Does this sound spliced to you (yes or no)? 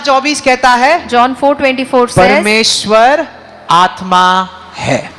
no